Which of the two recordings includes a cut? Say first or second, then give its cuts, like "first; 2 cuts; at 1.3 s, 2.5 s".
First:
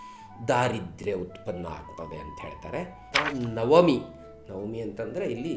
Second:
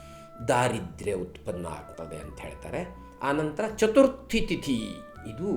first; 1 cut; at 3.1 s